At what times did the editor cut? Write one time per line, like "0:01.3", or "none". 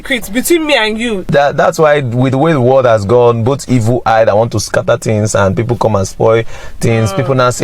0:01.3

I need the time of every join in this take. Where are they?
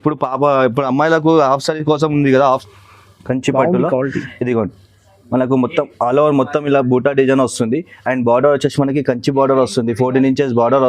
0:02.7

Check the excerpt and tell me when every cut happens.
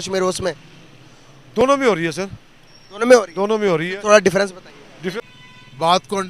0:05.2

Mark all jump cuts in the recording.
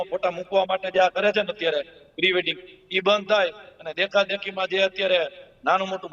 none

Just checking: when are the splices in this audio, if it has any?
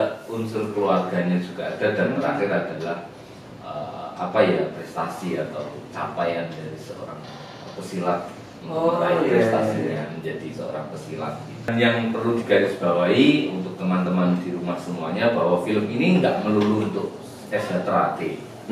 0:11.7

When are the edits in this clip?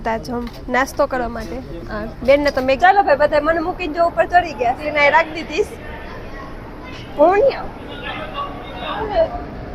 0:02.8
0:04.8
0:09.0

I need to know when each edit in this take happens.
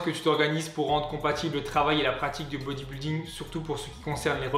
none

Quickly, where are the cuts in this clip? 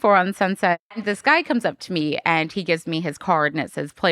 0:00.9

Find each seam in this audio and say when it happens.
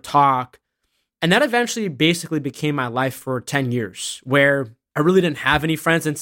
0:04.8

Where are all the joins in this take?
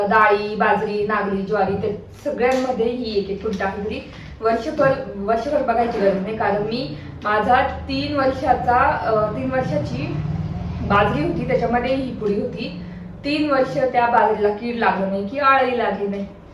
none

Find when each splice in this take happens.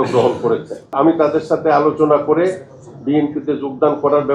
0:00.9

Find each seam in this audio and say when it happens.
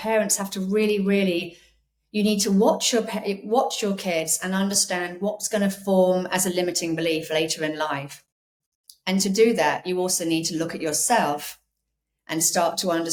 none

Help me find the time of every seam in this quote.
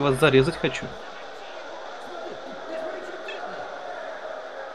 none

